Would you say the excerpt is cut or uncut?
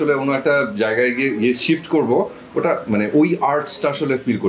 uncut